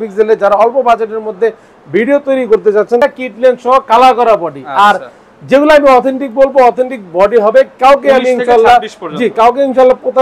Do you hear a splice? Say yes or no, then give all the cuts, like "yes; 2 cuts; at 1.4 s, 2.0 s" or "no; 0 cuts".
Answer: yes; 1 cut; at 3.0 s